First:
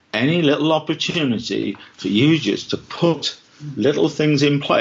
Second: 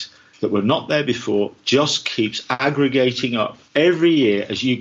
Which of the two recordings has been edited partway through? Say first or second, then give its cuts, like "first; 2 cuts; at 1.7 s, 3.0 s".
second; 2 cuts; at 2.5 s, 3.6 s